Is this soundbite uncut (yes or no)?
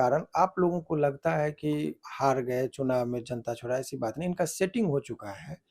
no